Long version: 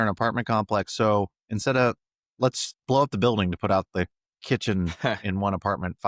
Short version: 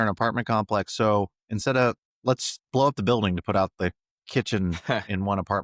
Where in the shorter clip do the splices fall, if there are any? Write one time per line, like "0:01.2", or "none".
0:02.1